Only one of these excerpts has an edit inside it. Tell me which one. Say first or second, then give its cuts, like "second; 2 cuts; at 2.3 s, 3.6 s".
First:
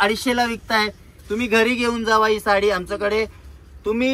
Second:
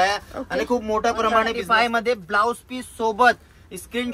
second; 1 cut; at 1.6 s